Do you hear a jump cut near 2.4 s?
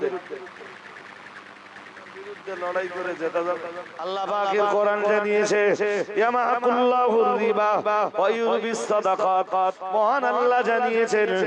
no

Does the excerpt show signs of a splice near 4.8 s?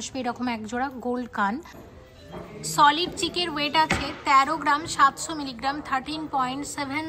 no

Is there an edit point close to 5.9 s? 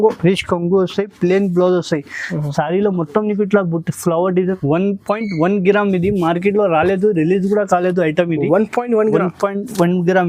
no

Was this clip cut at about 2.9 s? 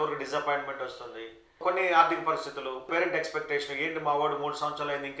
yes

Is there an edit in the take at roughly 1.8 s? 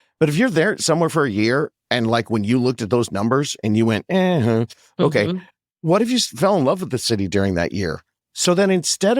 no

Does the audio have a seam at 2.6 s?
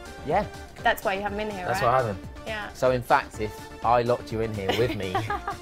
yes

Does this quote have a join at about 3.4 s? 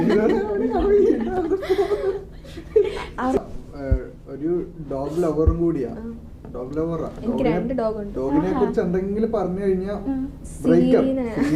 yes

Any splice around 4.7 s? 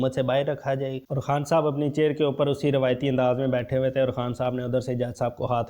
no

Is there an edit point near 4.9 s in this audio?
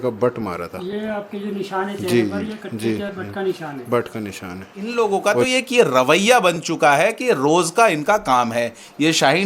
yes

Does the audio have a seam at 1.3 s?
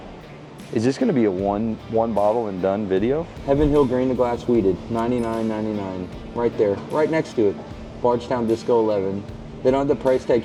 no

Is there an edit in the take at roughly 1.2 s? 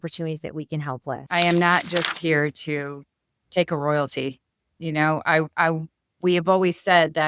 yes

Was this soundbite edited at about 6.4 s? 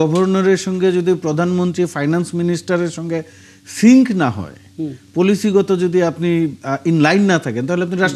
no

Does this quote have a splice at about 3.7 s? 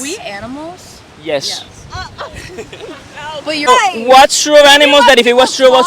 yes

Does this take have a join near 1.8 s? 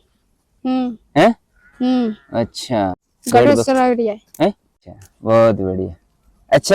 no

